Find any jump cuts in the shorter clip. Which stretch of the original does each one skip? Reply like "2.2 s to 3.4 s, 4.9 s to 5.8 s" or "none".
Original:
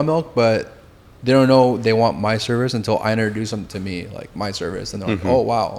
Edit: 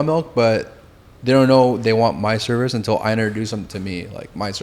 none